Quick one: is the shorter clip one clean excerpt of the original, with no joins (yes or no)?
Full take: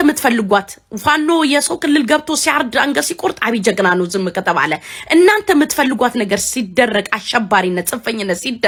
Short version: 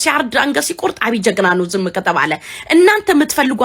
yes